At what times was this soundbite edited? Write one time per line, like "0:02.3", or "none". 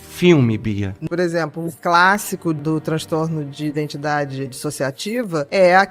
0:00.9